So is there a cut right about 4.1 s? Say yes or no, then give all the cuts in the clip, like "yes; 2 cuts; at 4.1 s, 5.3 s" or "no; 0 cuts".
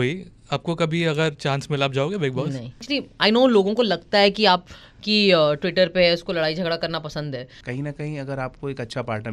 no; 2 cuts; at 2.8 s, 7.6 s